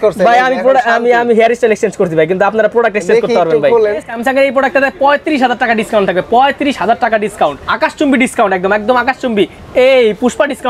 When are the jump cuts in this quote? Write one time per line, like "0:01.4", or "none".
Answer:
0:04.1
0:07.6